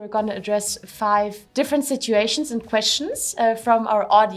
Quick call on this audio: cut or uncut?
cut